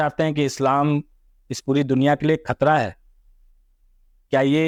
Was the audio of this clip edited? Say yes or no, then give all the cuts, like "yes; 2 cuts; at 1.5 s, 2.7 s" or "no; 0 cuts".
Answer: no; 0 cuts